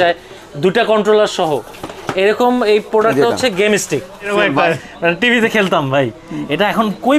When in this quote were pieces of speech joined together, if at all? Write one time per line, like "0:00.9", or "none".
0:04.3